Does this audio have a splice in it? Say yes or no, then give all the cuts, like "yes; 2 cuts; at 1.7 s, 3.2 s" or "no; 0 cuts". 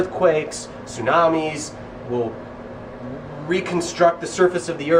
no; 0 cuts